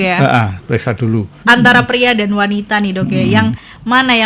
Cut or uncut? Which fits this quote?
cut